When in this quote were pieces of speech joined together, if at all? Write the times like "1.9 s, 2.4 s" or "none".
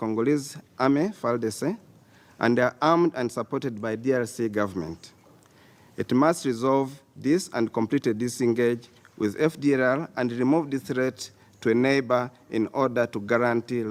none